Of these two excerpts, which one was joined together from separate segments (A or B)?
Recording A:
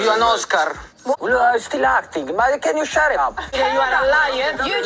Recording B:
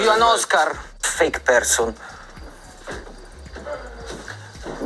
A